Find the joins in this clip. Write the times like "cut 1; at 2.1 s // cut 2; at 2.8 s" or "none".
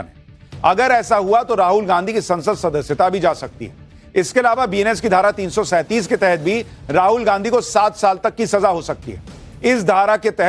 cut 1; at 6.6 s